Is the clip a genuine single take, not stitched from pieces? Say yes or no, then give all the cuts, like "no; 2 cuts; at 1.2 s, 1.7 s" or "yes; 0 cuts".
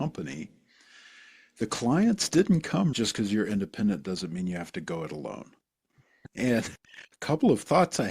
no; 2 cuts; at 2.9 s, 6.1 s